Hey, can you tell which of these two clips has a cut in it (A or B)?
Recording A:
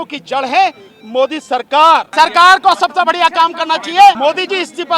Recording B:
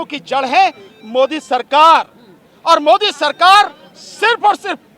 A